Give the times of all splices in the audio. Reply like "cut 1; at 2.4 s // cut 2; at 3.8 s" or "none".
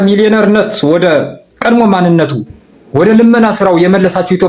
none